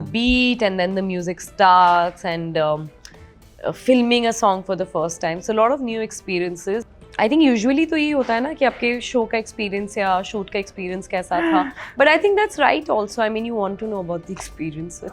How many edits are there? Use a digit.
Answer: 1